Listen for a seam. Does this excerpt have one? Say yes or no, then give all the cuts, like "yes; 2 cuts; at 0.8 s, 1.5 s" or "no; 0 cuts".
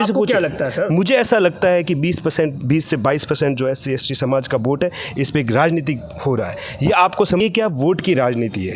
yes; 1 cut; at 7.4 s